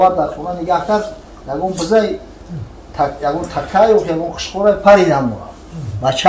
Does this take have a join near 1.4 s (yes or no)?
no